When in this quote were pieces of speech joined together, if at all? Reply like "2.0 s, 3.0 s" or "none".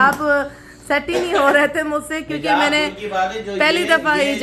none